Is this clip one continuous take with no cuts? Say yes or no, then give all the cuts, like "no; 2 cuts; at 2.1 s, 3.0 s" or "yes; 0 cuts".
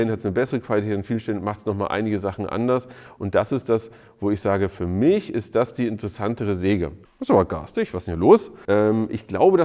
no; 2 cuts; at 7.0 s, 8.5 s